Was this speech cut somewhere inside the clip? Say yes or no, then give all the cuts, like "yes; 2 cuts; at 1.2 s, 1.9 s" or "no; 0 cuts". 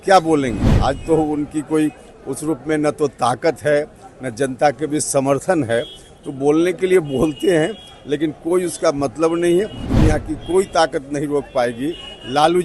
yes; 1 cut; at 9.8 s